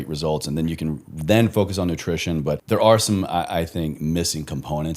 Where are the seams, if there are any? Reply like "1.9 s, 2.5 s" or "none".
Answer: 2.6 s